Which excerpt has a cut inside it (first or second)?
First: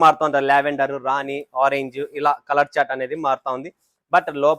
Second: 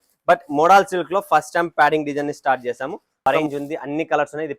second